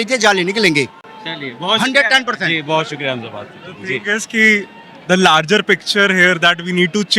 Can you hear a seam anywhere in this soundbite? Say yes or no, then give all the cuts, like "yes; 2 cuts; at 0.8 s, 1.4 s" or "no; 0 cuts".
no; 0 cuts